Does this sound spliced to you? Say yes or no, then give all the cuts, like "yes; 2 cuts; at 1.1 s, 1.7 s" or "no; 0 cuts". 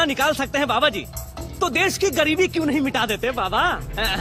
no; 0 cuts